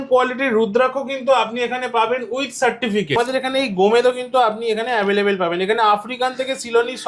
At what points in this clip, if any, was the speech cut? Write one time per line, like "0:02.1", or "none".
0:03.2